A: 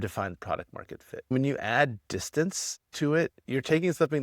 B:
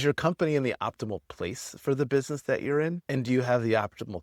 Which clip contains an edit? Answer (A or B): A